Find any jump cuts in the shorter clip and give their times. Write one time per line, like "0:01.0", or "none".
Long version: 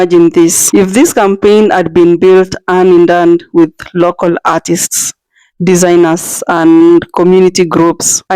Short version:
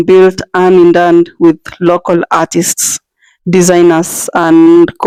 none